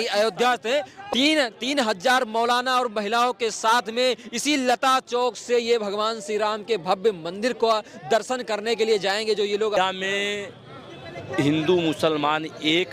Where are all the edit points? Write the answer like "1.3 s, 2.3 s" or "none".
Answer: 1.0 s, 9.8 s